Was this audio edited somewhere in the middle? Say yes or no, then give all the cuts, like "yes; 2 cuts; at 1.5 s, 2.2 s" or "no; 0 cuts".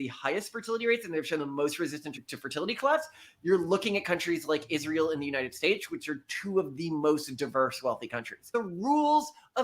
yes; 2 cuts; at 2.2 s, 8.5 s